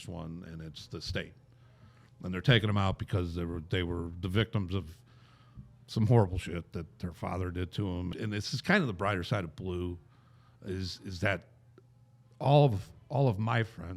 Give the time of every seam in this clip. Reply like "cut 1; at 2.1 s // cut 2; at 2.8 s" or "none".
cut 1; at 8.1 s